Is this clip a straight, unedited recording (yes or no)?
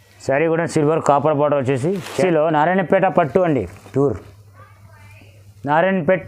no